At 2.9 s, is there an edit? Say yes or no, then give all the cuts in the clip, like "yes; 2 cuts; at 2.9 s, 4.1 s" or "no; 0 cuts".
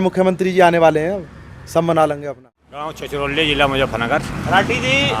yes; 1 cut; at 2.9 s